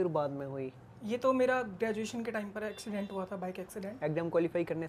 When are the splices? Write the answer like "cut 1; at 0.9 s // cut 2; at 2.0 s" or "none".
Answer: none